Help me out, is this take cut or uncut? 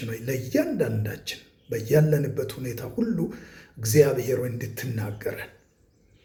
uncut